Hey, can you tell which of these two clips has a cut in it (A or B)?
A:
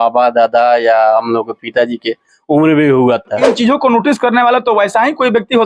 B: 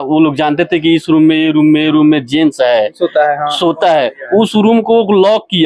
A